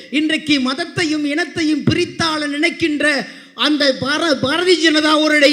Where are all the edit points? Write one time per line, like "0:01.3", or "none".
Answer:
none

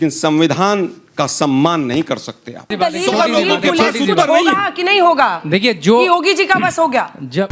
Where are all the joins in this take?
0:02.7

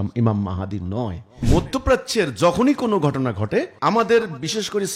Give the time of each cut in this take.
0:01.4
0:03.7

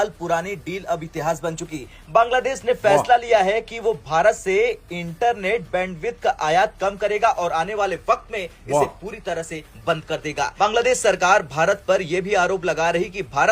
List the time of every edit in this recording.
0:10.5

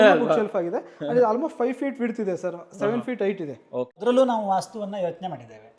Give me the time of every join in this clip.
0:04.0

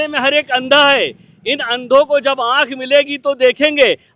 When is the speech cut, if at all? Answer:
none

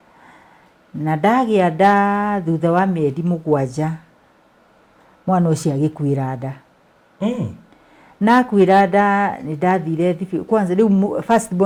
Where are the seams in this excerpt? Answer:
none

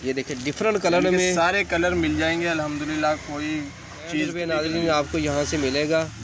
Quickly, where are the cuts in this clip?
0:04.3

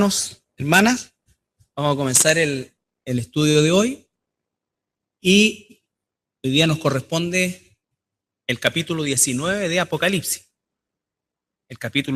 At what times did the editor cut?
none

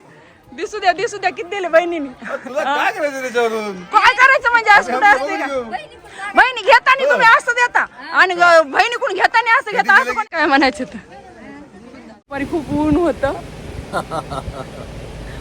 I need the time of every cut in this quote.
0:10.2
0:12.4

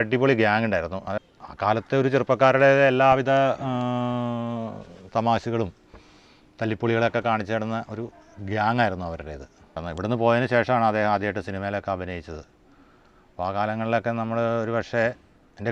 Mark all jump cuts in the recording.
0:01.1
0:09.9

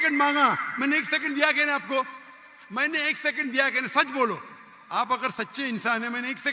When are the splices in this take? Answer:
none

